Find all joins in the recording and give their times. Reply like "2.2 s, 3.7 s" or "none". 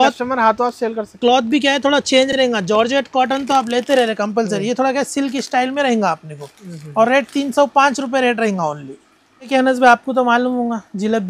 none

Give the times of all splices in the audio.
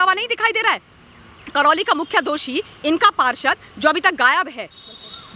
none

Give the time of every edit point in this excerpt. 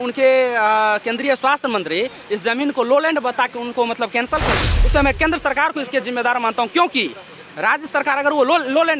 4.7 s

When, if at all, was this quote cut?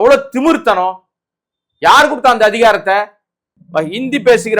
3.5 s

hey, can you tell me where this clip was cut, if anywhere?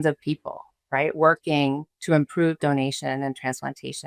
none

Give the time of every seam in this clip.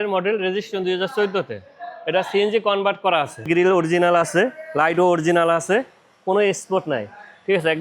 3.5 s

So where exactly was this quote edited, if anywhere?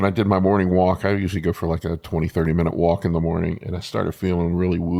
none

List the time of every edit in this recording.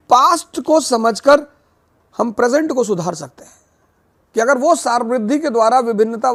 none

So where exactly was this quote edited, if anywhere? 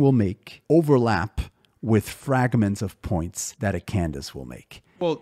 3.4 s

